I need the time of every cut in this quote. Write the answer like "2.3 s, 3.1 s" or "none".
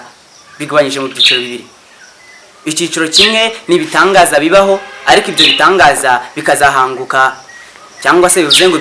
none